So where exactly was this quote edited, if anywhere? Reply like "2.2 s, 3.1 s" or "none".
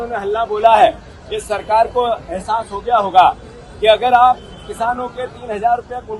none